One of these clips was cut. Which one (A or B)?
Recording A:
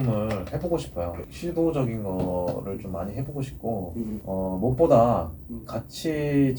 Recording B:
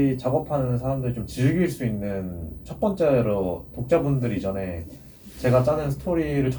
A